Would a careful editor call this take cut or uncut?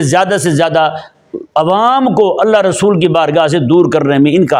uncut